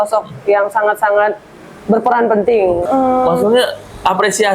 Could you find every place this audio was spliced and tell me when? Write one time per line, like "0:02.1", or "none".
0:02.8